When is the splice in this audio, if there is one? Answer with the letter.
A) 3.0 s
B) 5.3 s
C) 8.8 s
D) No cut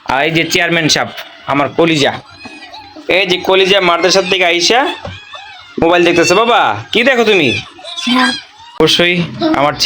C